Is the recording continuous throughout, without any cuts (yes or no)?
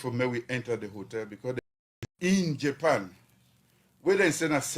no